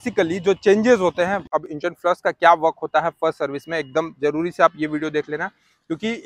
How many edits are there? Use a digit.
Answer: 1